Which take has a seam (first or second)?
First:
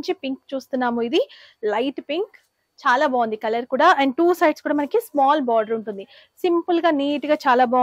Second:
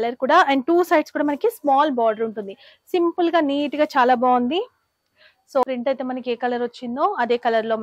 second